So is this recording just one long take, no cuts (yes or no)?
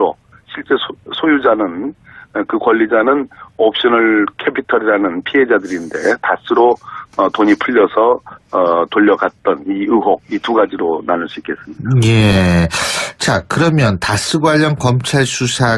yes